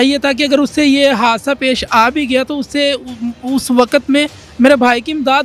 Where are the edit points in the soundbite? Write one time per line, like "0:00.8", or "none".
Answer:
none